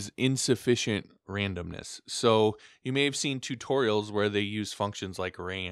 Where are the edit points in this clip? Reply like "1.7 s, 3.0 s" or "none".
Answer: 1.2 s